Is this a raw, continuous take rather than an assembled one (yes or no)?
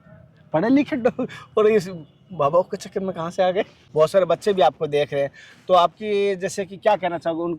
no